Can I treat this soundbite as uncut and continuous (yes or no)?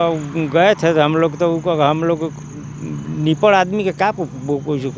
yes